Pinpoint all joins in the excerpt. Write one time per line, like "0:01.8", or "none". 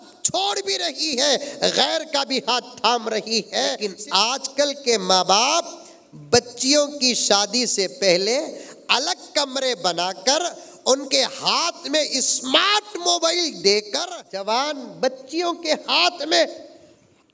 0:03.9
0:14.0